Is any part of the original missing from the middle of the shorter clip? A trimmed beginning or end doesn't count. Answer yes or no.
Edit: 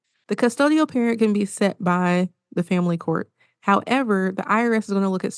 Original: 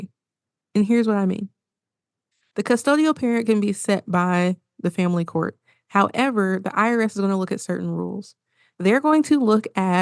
no